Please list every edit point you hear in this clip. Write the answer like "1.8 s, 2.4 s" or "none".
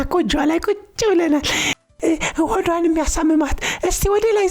1.9 s